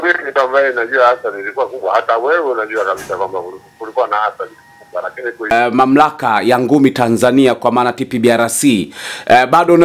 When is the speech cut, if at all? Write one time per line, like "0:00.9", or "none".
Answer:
0:05.5